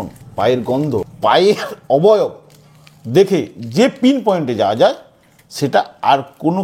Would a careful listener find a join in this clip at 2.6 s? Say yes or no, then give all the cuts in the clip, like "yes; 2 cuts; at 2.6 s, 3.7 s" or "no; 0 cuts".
no; 1 cut; at 1.1 s